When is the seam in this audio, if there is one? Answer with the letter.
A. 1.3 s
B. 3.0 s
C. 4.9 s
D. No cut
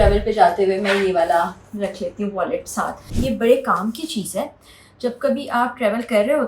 B